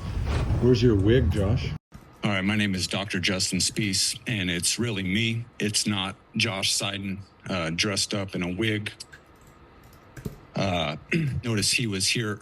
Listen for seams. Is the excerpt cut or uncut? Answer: uncut